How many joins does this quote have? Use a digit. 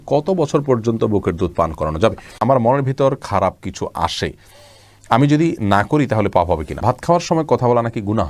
2